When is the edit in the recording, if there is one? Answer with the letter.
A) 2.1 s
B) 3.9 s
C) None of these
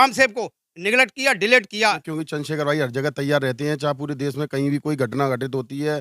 A